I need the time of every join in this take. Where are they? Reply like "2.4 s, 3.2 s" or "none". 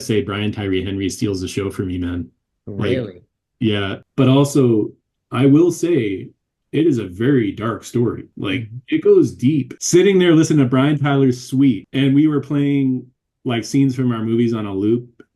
4.0 s, 8.3 s, 9.8 s, 11.9 s